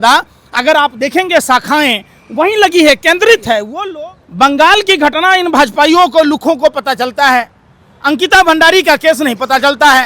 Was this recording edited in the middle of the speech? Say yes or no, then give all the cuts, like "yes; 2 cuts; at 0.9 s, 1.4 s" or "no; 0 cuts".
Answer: yes; 1 cut; at 3.7 s